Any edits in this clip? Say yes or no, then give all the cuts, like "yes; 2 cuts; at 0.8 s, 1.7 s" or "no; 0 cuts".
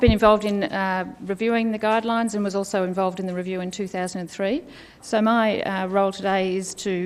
yes; 1 cut; at 3.0 s